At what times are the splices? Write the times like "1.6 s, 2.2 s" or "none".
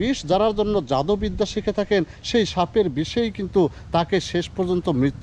none